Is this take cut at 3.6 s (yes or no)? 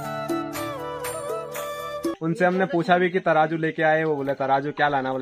no